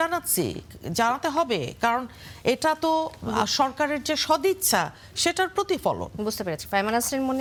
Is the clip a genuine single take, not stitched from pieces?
yes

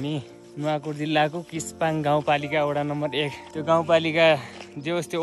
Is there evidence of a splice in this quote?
no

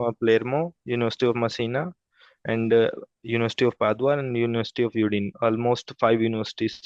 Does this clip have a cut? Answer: no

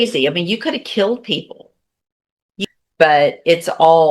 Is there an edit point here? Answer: yes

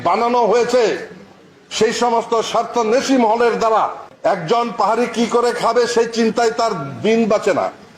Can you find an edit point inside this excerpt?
no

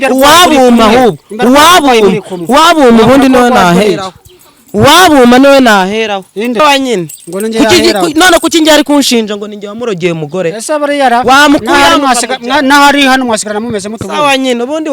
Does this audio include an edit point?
yes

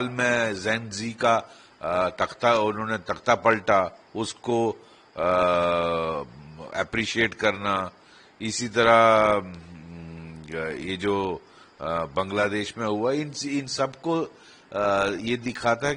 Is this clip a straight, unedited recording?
yes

